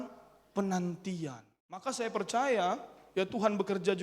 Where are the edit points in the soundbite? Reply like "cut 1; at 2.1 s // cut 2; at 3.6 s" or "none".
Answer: cut 1; at 1.8 s